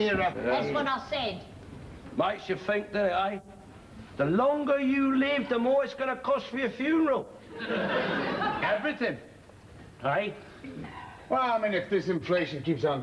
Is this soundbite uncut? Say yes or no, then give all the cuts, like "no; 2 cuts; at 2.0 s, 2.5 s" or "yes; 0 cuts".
yes; 0 cuts